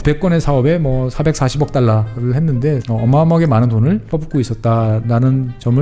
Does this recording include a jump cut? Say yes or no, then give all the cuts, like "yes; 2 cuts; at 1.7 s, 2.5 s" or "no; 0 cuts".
yes; 2 cuts; at 2.8 s, 4.0 s